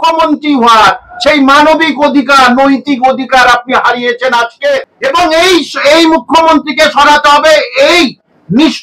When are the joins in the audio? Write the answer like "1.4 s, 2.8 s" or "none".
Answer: 4.9 s